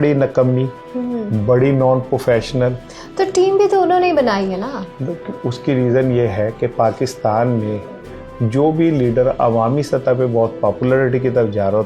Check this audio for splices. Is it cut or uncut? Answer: uncut